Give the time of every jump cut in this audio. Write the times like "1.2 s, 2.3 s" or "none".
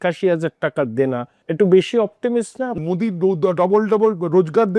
1.4 s, 2.8 s